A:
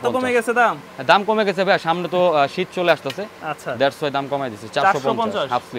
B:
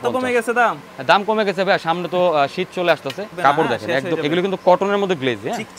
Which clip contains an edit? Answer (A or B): B